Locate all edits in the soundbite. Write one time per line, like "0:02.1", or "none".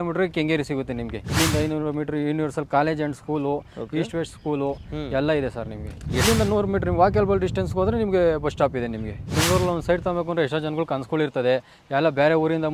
0:01.3
0:06.2
0:09.2